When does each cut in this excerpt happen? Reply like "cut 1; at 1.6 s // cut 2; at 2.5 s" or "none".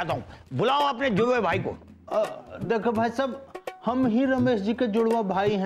none